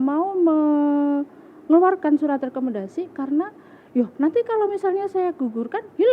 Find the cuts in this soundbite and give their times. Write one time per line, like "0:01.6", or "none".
none